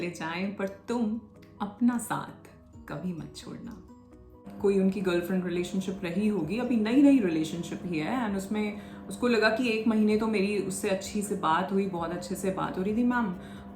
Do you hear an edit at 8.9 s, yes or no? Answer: no